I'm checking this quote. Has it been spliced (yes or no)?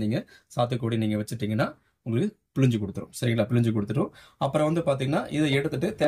no